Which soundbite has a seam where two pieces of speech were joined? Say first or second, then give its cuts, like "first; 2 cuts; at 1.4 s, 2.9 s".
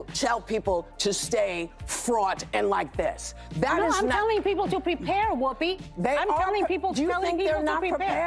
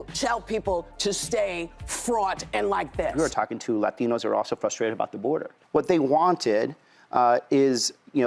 second; 2 cuts; at 3.1 s, 5.6 s